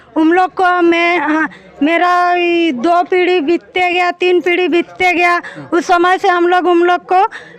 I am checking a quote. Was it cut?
no; 0 cuts

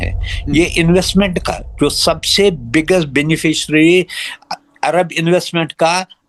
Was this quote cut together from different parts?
no; 0 cuts

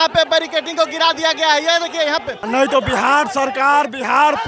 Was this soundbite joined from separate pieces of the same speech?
yes; 1 cut; at 2.4 s

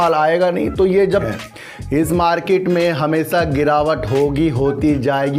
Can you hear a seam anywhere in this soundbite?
yes; 1 cut; at 1.3 s

